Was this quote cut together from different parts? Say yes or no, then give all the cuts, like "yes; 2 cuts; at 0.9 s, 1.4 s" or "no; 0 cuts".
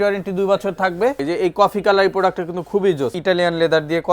yes; 2 cuts; at 1.2 s, 3.2 s